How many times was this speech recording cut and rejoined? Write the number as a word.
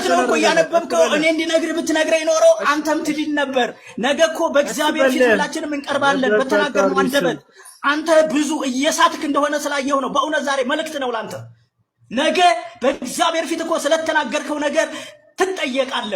zero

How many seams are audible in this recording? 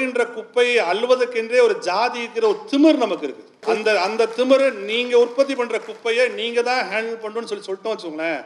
one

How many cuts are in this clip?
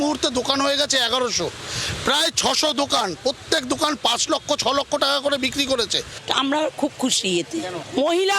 one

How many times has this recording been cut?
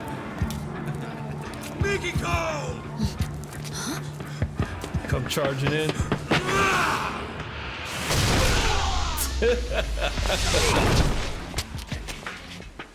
zero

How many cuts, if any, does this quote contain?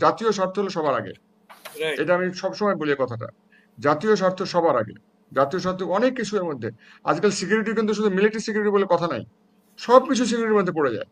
zero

